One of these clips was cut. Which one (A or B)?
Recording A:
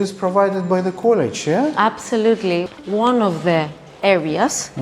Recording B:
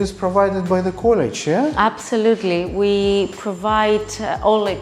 A